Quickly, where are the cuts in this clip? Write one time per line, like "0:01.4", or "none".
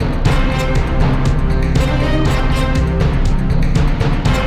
none